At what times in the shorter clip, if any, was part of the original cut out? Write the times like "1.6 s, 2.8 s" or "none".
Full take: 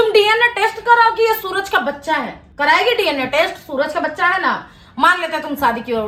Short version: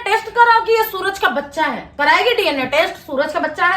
1.8 s